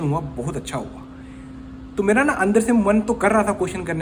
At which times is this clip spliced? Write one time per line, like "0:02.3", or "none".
none